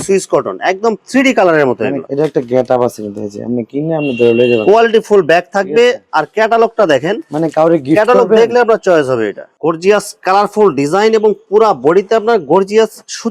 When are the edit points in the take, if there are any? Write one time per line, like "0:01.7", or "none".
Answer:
0:02.0
0:09.4